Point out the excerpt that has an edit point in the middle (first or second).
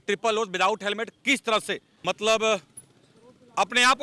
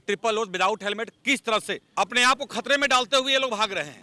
second